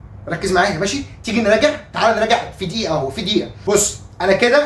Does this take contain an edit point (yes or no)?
yes